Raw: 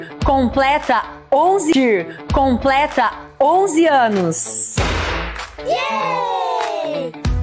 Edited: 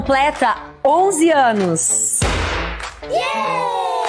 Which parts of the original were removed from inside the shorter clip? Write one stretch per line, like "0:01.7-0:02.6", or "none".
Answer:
0:01.6-0:03.7